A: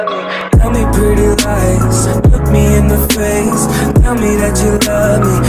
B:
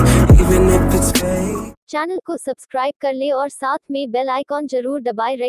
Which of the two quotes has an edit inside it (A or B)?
B